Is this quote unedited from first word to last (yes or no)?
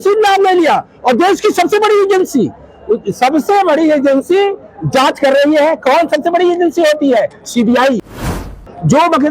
no